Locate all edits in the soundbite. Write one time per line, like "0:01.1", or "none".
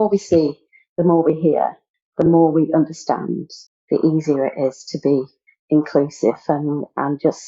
none